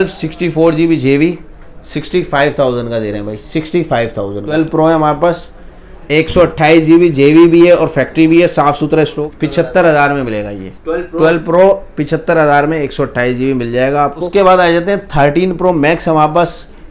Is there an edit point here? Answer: yes; 3 cuts; at 4.5 s, 9.1 s, 14.3 s

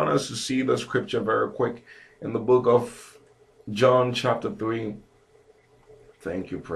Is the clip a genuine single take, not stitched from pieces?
no; 1 cut; at 1.8 s

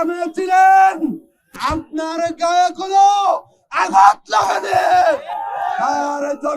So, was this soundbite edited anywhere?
no; 0 cuts

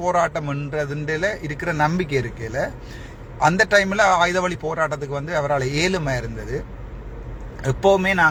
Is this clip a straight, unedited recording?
yes; 0 cuts

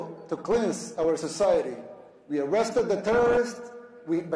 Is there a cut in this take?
no; 0 cuts

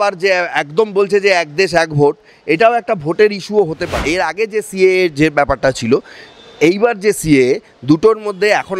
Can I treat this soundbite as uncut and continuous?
no; 1 cut; at 3.9 s

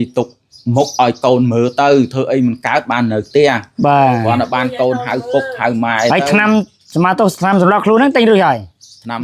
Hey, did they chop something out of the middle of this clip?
no; 0 cuts

